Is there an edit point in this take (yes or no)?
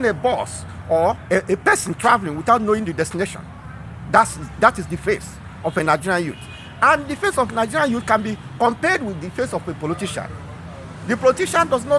yes